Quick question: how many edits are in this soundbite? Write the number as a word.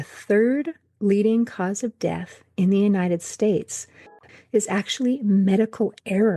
one